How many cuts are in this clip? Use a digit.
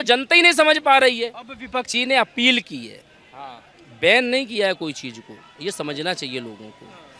1